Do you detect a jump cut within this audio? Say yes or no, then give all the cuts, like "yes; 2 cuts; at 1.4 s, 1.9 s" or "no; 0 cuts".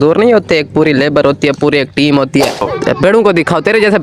yes; 1 cut; at 2.6 s